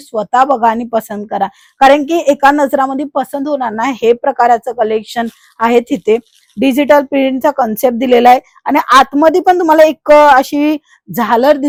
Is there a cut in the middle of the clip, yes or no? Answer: no